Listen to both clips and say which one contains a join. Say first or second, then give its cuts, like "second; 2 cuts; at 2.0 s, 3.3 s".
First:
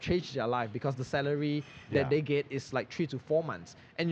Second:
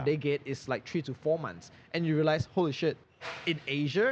second; 1 cut; at 3.1 s